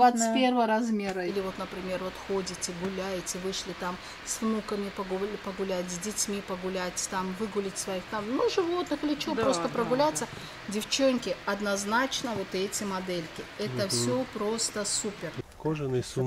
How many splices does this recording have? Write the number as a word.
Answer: two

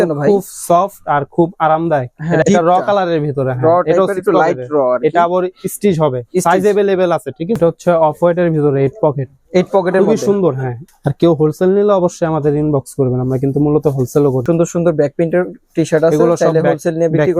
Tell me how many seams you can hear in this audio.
four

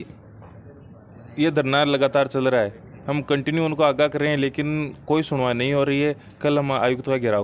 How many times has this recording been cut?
zero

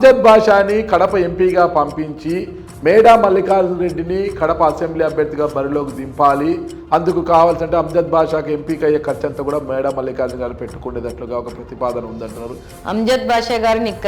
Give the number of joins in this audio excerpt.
one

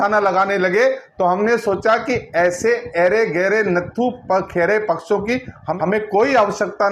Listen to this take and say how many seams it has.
one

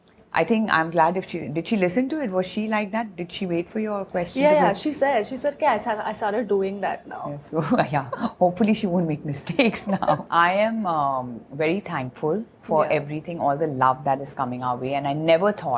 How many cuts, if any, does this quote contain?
one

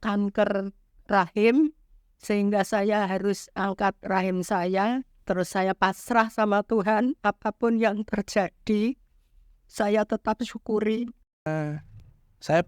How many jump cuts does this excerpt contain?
two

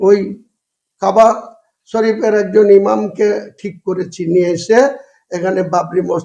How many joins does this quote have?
zero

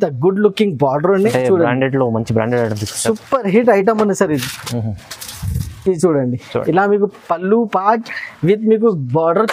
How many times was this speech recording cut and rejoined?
one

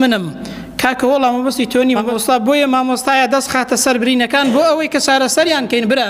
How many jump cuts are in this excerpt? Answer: one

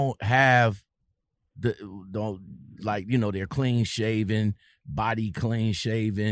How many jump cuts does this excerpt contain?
zero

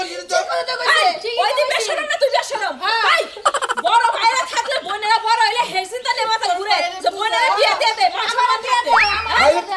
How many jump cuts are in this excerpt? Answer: zero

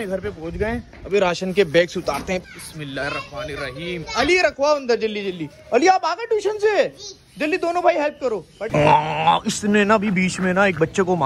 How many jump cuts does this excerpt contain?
two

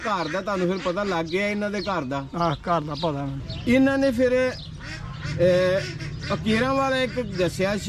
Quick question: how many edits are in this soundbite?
one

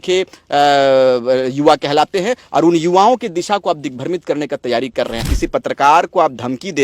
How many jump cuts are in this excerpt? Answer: one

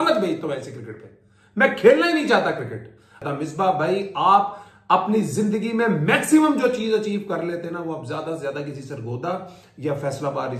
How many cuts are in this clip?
one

